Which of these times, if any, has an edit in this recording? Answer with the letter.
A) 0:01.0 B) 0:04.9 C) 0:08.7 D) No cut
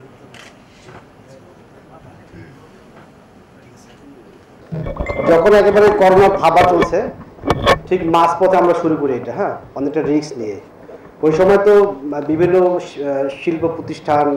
A